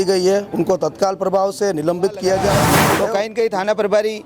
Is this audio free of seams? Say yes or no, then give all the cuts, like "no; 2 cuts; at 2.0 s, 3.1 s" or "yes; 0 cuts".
no; 1 cut; at 2.8 s